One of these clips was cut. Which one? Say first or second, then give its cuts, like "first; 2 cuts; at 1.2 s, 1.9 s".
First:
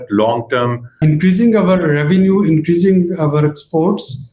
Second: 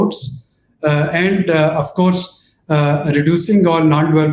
first; 1 cut; at 1.0 s